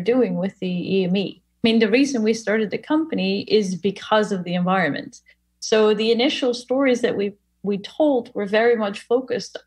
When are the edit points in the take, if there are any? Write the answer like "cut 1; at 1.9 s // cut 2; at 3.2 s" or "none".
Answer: cut 1; at 1.6 s